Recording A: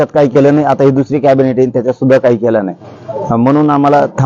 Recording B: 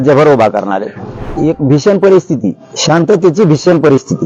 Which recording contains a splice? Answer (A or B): B